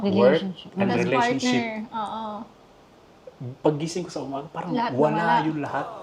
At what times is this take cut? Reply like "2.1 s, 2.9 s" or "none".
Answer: none